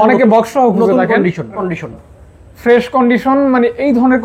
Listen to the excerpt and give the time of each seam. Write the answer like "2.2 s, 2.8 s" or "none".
1.7 s